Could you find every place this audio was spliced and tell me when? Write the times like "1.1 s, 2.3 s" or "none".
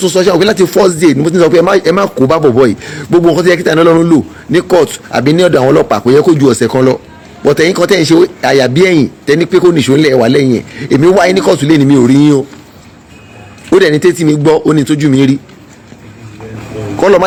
none

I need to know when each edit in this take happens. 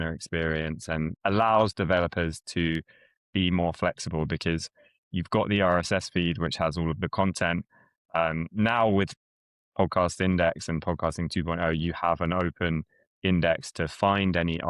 1.1 s

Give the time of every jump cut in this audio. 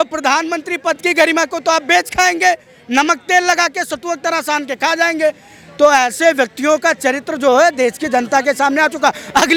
none

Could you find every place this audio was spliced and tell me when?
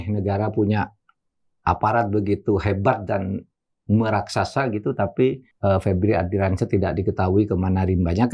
5.5 s

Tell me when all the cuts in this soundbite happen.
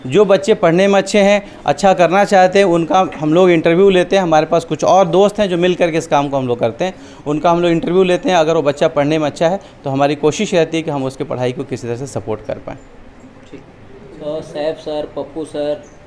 none

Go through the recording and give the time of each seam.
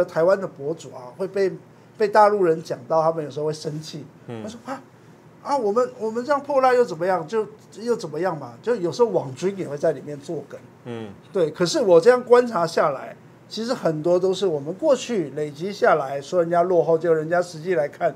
none

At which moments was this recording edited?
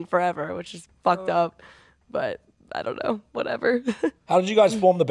4.2 s

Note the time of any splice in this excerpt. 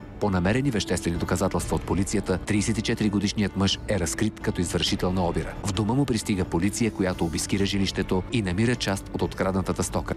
2.4 s

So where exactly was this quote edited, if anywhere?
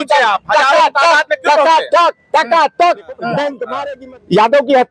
3.7 s

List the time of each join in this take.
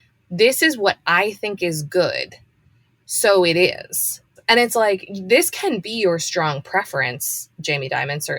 4.2 s

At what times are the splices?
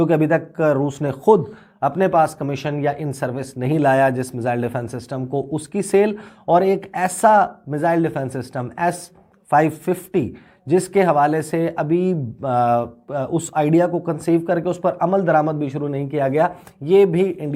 none

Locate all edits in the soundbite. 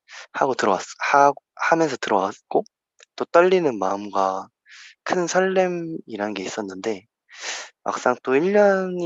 none

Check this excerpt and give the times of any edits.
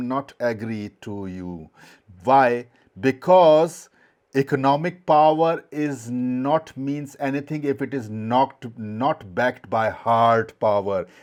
none

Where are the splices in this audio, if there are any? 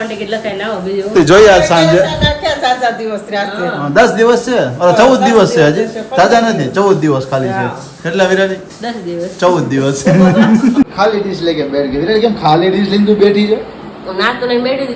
10.9 s

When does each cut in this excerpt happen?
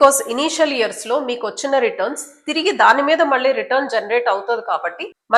none

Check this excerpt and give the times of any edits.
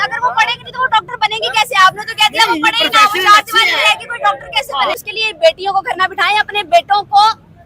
5.1 s

